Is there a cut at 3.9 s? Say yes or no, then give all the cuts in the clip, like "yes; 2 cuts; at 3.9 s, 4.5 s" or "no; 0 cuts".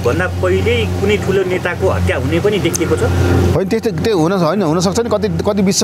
no; 0 cuts